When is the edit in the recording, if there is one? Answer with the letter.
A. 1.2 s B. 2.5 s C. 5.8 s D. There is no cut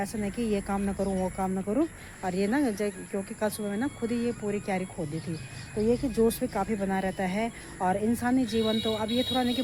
D